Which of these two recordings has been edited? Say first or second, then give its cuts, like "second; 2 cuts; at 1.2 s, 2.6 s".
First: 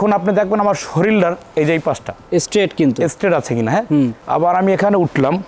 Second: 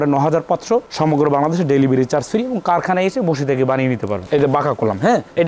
second; 1 cut; at 4.1 s